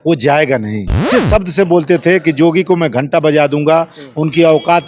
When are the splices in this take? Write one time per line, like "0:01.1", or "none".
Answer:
0:01.1